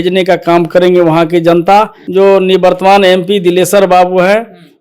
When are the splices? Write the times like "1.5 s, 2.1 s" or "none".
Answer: 2.0 s